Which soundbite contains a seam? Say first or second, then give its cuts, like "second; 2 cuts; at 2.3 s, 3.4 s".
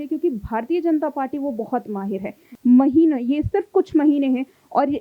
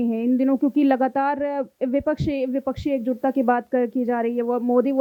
first; 1 cut; at 2.5 s